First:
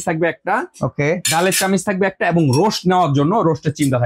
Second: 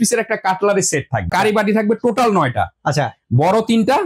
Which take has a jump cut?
second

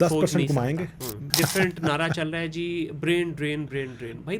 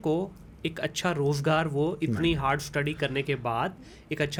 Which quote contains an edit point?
first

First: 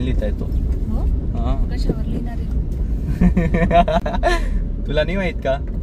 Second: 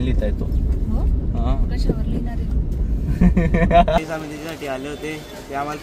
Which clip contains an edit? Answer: second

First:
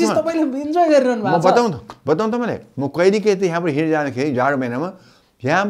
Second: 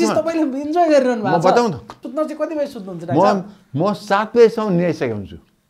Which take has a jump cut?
second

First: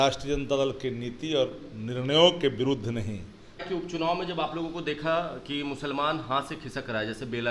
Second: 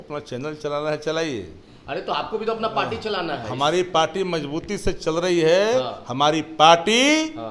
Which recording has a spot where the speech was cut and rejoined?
first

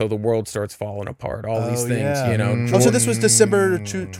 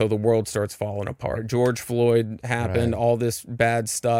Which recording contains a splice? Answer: second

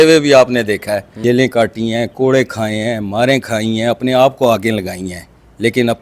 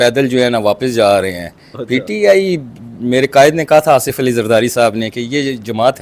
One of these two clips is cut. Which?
first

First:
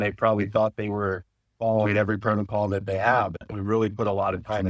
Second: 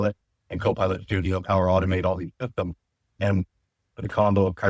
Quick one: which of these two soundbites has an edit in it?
first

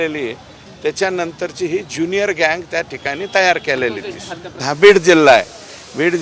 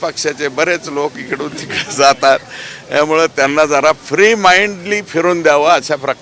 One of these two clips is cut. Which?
first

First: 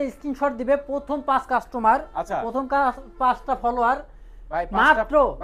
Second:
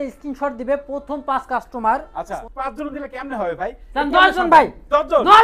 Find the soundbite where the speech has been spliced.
second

